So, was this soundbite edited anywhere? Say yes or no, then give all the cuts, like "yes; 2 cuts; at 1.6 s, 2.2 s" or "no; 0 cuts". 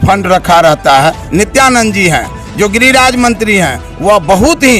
yes; 1 cut; at 1.2 s